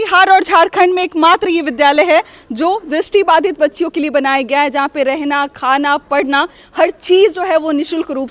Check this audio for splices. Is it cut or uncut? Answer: uncut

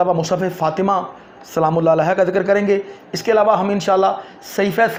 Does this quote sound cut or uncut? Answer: uncut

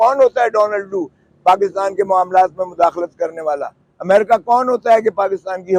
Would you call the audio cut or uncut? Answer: uncut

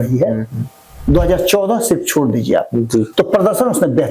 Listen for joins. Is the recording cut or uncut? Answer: cut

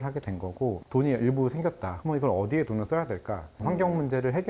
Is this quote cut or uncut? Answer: cut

